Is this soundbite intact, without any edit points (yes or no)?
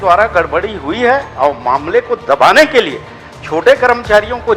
yes